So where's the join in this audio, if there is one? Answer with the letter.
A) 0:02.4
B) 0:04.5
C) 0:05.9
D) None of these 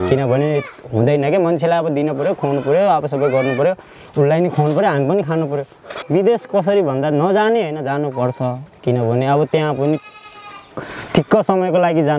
C